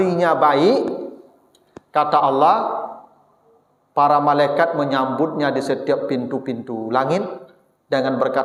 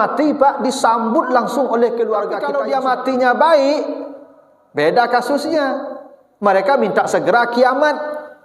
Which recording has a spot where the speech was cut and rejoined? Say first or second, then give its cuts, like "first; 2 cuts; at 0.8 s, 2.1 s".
second; 1 cut; at 2.5 s